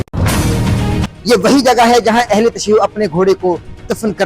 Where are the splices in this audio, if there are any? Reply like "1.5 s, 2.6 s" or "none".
1.1 s